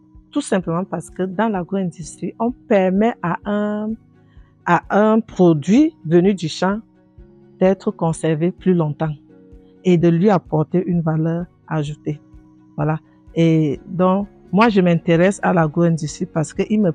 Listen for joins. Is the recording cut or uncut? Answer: uncut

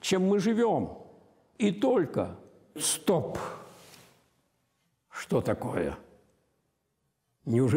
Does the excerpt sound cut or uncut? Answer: cut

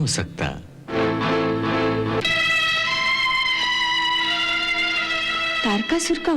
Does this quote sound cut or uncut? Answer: uncut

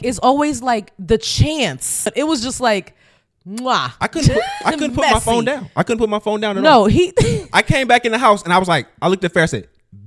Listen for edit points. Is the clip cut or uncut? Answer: cut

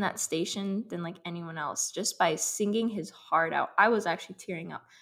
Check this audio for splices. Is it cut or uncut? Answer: uncut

